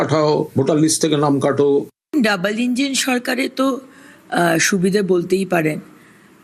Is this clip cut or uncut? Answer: cut